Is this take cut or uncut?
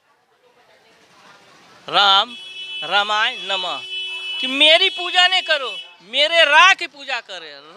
uncut